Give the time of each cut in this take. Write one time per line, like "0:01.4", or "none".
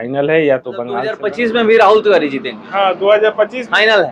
0:01.2